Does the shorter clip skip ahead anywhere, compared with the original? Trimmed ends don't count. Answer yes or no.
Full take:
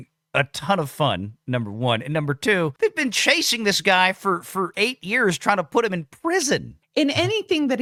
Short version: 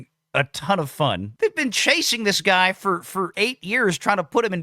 yes